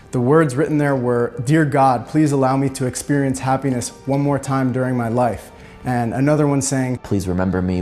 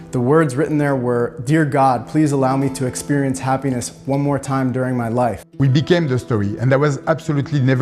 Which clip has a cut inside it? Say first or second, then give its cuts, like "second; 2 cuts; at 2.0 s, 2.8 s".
second; 1 cut; at 5.5 s